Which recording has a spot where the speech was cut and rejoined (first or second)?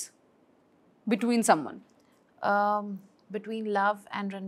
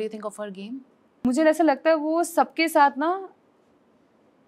second